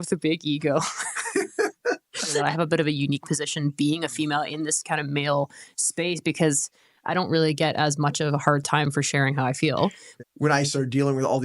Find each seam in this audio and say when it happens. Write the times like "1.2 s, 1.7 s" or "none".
2.4 s, 10.1 s